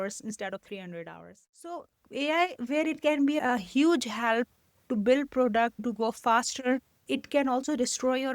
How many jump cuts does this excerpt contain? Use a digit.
4